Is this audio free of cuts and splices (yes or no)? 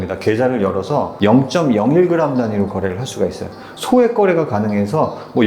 no